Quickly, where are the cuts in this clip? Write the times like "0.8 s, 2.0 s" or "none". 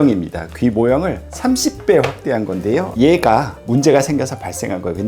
2.9 s